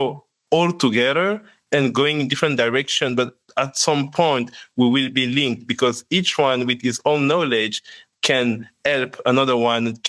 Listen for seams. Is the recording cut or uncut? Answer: uncut